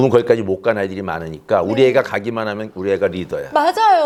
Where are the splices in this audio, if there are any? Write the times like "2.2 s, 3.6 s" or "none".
none